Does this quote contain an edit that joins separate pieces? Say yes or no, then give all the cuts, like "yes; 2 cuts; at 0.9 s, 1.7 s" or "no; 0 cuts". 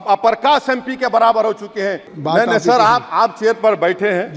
yes; 1 cut; at 2.1 s